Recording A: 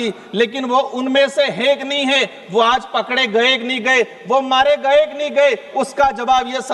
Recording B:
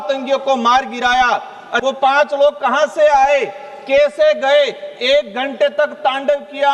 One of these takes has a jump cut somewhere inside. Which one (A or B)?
B